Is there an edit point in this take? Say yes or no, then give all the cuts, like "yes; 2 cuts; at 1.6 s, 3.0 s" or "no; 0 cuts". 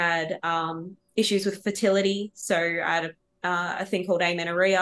no; 0 cuts